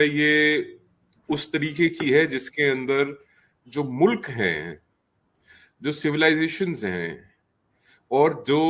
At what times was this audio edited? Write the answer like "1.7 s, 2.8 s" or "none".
none